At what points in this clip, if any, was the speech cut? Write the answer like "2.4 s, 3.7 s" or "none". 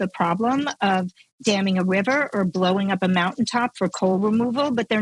none